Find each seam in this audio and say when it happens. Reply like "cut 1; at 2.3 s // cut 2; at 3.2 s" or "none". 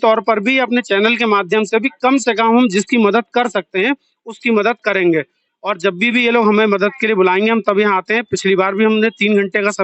none